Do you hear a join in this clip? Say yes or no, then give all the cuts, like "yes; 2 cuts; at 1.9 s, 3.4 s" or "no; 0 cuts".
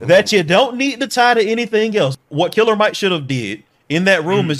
yes; 1 cut; at 2.2 s